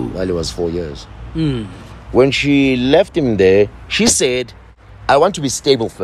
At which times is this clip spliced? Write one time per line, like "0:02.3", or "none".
none